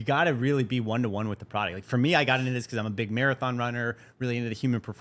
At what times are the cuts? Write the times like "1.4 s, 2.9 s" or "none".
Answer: none